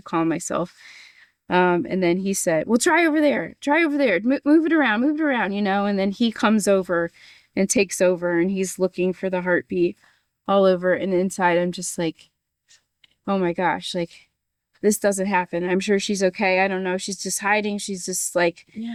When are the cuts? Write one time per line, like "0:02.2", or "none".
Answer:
none